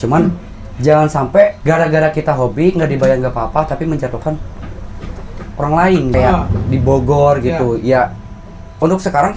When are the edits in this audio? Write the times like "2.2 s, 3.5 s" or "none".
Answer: 1.6 s, 6.1 s